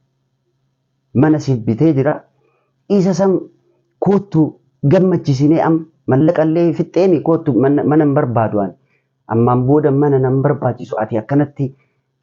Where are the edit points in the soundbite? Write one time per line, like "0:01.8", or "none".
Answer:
none